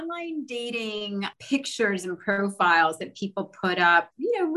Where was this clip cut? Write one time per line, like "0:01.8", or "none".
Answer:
0:01.3

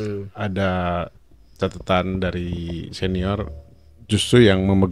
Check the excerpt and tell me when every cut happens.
none

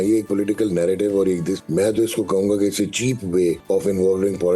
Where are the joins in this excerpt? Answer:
0:01.6
0:03.6

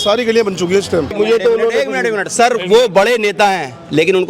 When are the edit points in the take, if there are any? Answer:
0:01.1

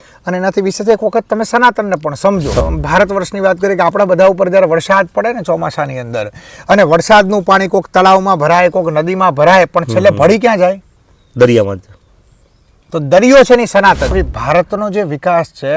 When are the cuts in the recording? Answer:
0:02.6
0:14.1

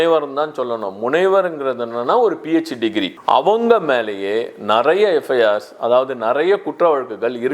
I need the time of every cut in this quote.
0:03.1

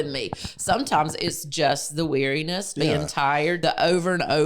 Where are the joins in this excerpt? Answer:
0:02.7
0:03.6

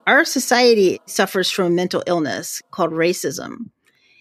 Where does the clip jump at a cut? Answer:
0:01.0

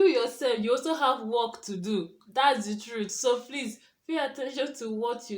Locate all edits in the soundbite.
none

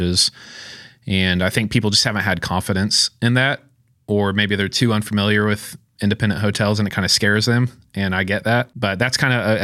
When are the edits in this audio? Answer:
0:08.7

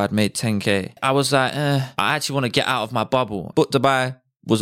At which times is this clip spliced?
0:00.9
0:01.9
0:03.5

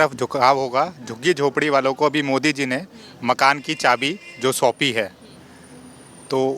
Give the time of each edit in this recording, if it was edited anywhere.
none

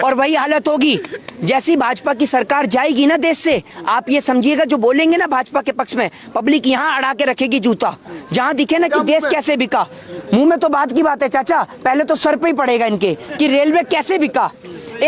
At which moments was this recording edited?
none

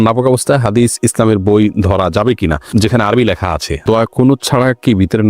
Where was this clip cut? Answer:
0:03.8

